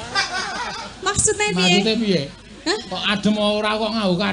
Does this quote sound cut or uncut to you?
uncut